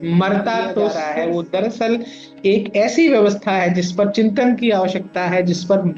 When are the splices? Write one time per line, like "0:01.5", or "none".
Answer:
0:01.0